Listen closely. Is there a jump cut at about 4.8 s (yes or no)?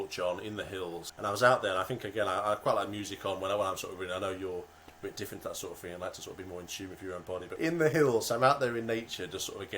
no